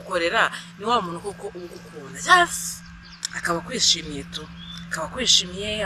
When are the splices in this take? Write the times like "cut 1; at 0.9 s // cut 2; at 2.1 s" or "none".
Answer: none